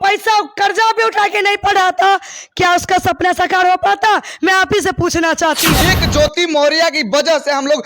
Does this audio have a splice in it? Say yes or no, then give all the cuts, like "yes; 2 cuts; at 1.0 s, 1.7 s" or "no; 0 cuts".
yes; 1 cut; at 5.8 s